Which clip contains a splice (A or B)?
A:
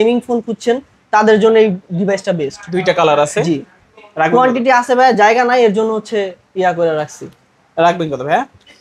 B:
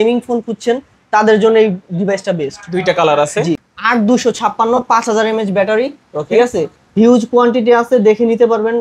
B